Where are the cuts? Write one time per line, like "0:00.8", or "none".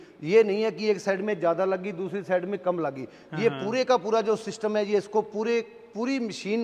none